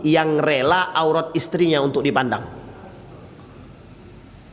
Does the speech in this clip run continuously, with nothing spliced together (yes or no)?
yes